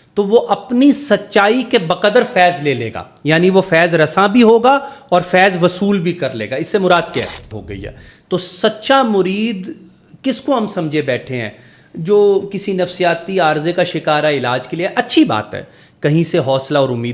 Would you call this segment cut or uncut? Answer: cut